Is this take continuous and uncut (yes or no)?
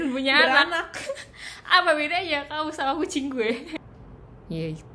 no